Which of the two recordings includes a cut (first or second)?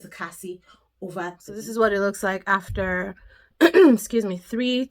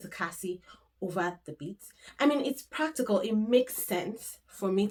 first